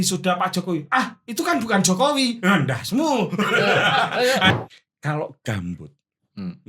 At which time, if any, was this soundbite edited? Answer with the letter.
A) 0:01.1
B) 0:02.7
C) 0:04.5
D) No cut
C